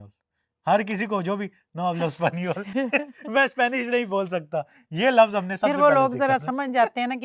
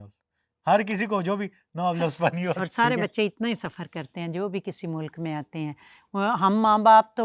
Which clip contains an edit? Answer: second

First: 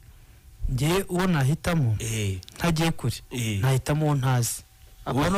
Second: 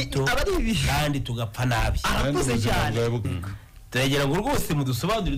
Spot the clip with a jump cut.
second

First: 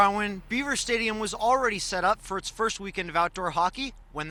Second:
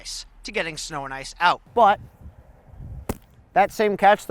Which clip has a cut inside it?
second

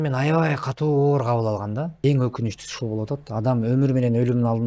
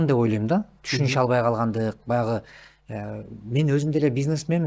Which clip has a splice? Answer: first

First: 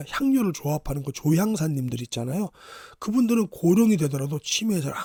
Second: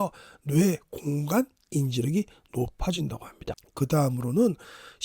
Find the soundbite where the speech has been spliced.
second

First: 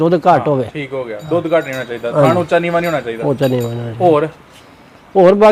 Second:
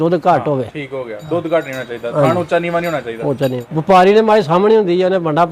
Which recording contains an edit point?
second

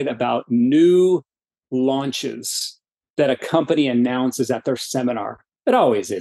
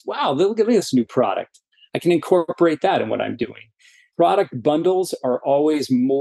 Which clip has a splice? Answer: second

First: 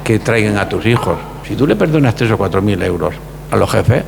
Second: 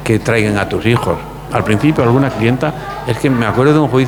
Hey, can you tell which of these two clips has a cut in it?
first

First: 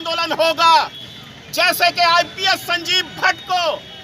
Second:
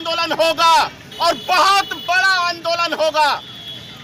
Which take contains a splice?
first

